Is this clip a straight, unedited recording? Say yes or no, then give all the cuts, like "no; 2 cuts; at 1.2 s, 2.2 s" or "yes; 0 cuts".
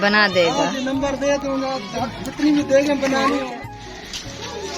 no; 1 cut; at 3.5 s